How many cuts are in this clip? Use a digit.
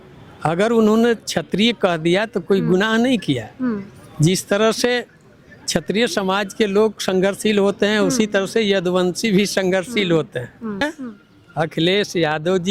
1